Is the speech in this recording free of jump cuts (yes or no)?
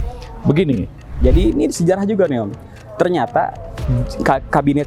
no